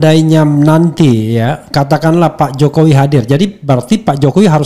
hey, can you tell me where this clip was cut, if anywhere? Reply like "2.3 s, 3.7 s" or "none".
none

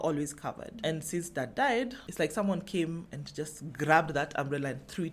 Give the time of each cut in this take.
2.0 s

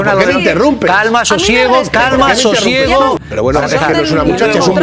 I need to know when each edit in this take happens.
3.2 s

